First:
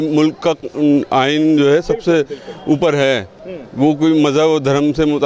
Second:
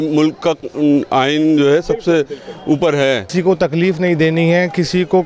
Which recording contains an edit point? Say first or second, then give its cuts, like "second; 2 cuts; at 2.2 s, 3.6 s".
second; 1 cut; at 3.3 s